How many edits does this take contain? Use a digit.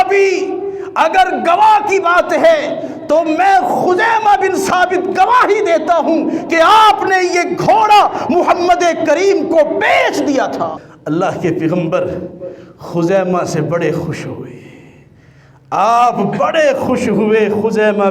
1